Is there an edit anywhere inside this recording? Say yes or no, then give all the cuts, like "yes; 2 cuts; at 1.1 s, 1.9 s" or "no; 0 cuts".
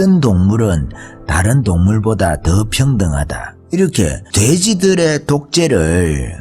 no; 0 cuts